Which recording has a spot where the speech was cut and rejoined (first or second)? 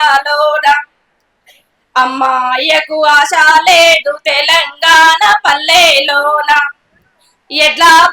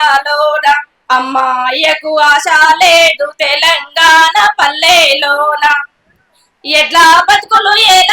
second